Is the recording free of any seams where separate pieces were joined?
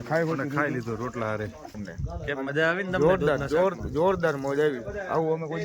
no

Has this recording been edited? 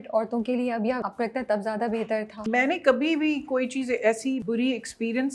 yes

